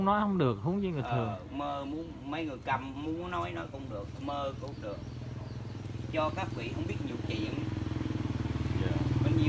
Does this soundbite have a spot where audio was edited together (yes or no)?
no